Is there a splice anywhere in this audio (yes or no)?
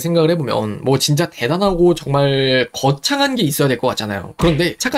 no